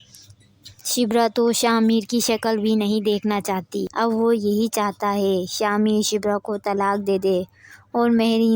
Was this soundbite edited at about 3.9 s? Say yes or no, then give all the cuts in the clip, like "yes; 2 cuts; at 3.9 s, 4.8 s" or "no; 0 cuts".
yes; 1 cut; at 3.9 s